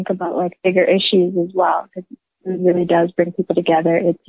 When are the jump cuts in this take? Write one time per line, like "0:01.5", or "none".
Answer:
0:02.3